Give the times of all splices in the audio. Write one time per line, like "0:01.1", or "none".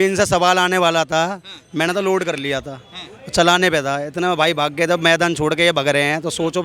none